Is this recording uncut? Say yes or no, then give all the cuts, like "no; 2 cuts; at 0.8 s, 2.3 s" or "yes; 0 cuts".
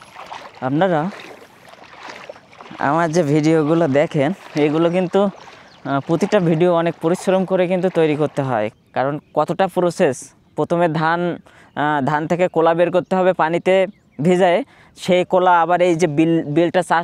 no; 1 cut; at 8.7 s